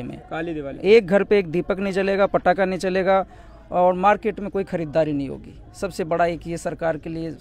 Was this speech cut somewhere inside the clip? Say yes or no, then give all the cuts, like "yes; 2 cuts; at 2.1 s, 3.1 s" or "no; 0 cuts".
no; 0 cuts